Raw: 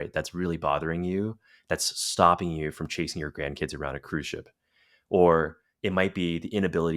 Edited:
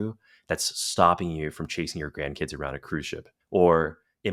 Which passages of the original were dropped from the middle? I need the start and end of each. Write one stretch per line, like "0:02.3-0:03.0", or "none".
0:04.6-0:04.9

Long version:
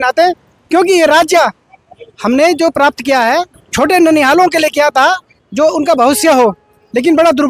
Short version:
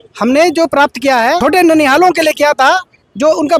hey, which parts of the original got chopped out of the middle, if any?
0:03.4-0:03.8

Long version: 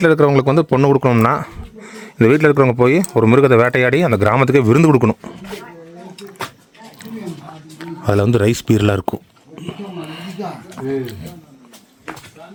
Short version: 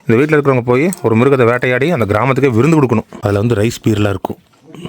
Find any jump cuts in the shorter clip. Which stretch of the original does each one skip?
0:05.2-0:08.0

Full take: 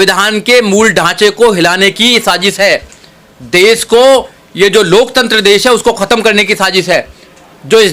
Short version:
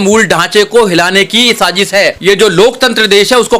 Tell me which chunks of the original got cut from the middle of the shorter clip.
0:02.8-0:04.5

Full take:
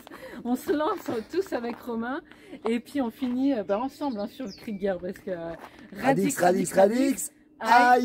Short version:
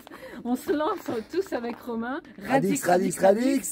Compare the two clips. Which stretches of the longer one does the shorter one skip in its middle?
0:02.3-0:05.9

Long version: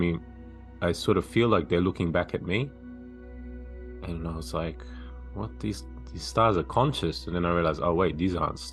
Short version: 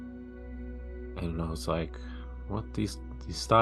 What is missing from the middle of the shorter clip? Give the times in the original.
none

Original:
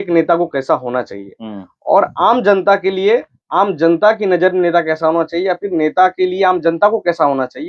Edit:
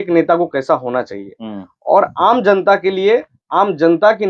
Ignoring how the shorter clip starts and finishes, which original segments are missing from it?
none

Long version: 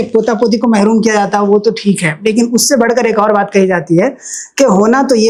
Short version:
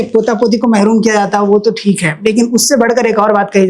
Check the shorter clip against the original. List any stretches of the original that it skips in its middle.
none

